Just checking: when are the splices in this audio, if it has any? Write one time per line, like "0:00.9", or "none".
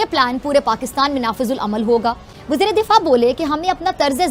none